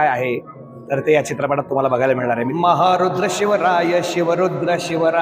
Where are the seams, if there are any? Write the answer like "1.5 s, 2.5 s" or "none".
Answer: 2.5 s